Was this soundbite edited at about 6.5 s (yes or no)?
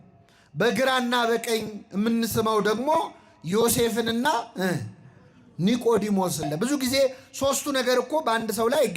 yes